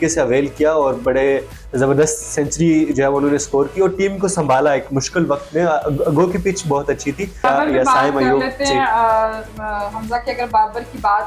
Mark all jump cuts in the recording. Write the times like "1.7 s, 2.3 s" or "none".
7.4 s